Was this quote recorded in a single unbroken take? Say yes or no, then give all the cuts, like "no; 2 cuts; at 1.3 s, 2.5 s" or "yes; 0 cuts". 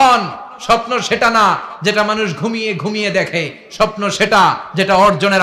yes; 0 cuts